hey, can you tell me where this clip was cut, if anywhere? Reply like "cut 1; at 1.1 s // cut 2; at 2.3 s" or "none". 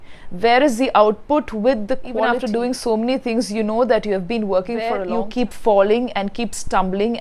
cut 1; at 2.3 s // cut 2; at 5.0 s